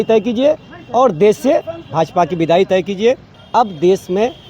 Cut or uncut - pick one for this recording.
cut